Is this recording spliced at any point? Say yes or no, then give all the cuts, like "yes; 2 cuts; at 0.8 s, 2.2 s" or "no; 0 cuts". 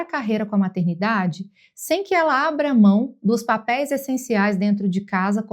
no; 0 cuts